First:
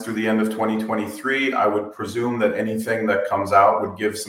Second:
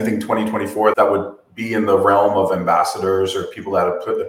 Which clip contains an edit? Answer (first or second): second